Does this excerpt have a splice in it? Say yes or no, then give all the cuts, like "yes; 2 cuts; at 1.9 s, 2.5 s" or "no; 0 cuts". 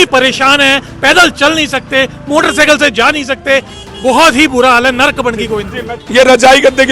yes; 1 cut; at 5.9 s